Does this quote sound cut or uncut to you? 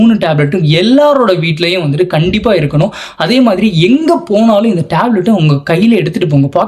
uncut